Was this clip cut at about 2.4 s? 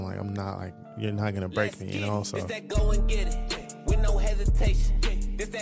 yes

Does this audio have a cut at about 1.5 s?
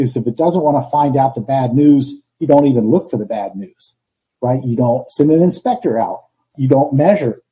no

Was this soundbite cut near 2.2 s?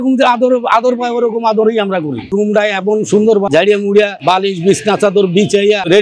yes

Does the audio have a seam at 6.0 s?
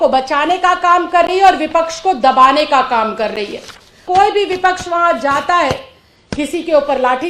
no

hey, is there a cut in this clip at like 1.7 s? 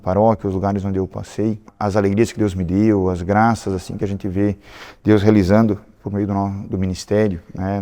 yes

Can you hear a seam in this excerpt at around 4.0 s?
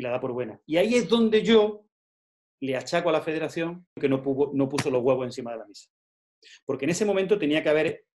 yes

